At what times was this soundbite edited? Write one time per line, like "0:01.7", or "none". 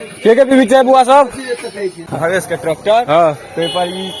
0:02.1

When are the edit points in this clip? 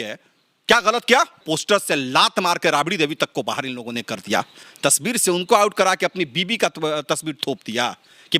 0:01.4
0:04.6

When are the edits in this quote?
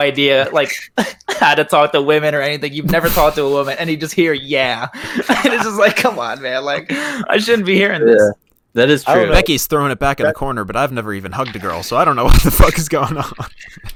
none

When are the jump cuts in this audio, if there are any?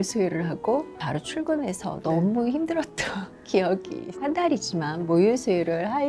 0:01.0
0:04.2

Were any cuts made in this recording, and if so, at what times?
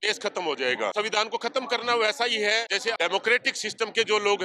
0:00.9
0:02.8

